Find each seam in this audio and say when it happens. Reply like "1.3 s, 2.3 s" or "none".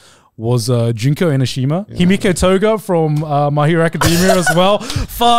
1.9 s